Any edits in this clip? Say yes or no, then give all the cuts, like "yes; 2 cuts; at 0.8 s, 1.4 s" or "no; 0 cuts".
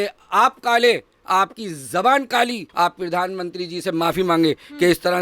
yes; 1 cut; at 2.7 s